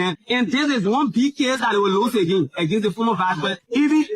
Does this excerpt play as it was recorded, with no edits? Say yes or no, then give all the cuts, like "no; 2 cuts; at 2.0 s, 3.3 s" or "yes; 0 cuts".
yes; 0 cuts